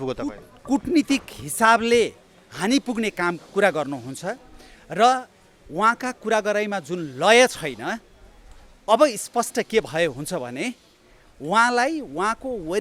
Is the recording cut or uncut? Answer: uncut